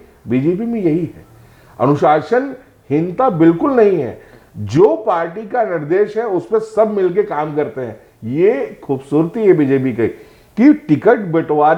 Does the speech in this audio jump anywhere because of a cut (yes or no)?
no